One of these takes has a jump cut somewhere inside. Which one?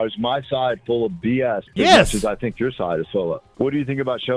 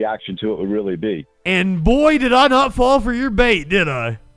first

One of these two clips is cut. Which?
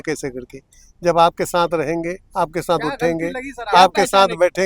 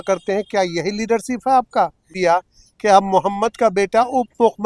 second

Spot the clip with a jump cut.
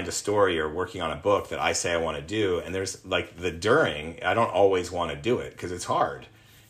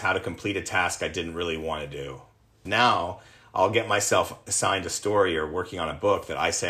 second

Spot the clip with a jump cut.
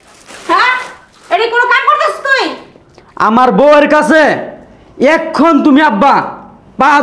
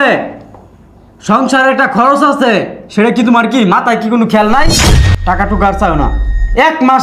second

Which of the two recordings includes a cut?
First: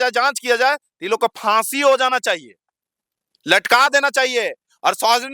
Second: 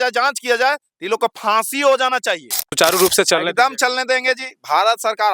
second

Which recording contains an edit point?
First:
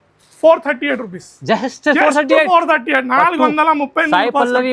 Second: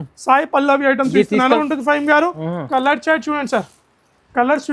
second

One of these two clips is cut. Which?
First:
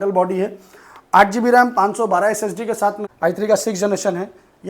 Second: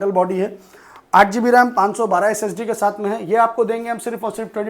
first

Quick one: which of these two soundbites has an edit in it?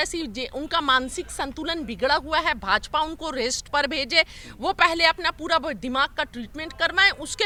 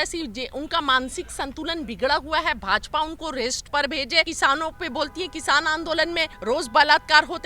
second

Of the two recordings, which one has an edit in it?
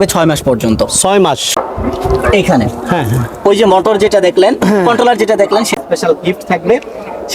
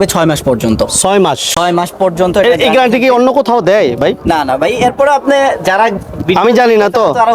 first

